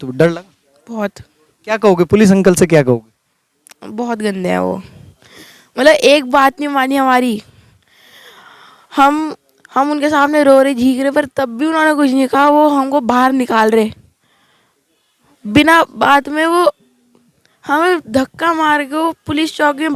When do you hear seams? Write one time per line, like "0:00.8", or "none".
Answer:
none